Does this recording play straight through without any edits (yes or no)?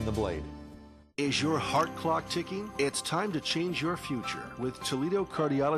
no